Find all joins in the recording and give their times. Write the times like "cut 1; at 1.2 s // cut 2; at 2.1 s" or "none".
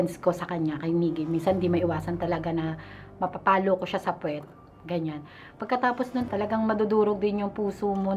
cut 1; at 6.3 s